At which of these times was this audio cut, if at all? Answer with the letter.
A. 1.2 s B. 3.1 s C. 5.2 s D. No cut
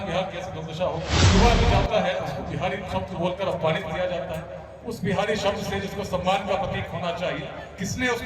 A